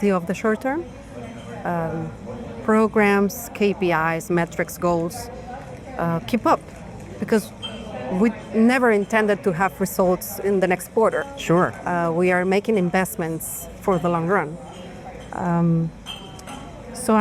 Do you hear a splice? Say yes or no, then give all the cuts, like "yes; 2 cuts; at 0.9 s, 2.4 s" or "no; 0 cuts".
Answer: no; 0 cuts